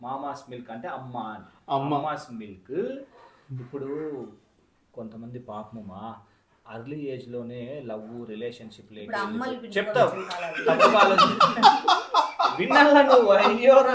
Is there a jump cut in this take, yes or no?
no